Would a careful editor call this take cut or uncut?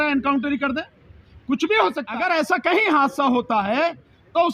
cut